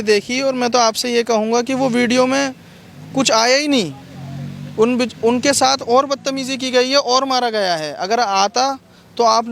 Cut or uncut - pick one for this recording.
uncut